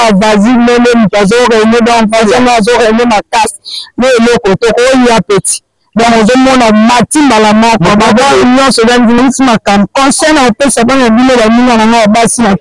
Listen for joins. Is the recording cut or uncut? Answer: uncut